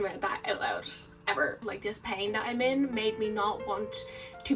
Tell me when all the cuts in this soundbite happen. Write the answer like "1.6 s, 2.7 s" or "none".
1.6 s